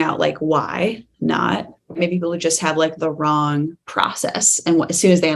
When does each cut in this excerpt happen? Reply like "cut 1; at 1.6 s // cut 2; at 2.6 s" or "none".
cut 1; at 2.0 s